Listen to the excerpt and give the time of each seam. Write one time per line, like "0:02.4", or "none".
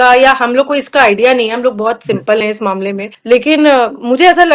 0:03.1